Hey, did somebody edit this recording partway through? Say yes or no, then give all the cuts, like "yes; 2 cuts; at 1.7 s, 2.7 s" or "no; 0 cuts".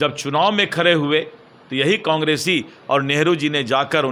no; 0 cuts